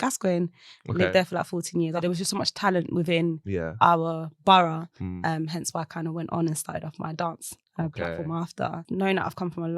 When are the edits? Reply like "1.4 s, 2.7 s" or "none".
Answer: 2.0 s, 8.8 s